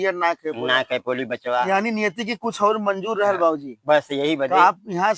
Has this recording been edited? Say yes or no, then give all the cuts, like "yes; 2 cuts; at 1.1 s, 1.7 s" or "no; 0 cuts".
no; 0 cuts